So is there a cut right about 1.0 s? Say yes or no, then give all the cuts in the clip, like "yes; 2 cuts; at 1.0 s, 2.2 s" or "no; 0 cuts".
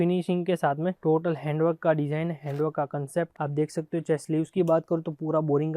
yes; 1 cut; at 1.0 s